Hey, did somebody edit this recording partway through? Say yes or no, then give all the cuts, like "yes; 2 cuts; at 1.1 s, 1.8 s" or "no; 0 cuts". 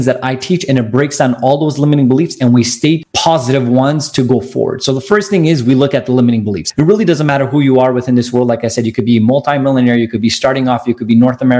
yes; 2 cuts; at 3.1 s, 6.6 s